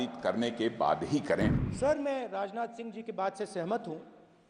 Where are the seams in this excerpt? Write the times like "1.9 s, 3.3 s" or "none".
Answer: 1.6 s